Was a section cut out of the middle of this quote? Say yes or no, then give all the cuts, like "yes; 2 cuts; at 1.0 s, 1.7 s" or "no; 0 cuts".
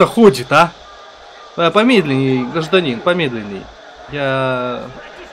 no; 0 cuts